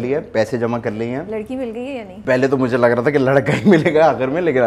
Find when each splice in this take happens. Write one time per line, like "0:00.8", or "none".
0:02.1